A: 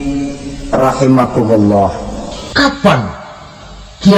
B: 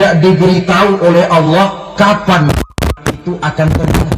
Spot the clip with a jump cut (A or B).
A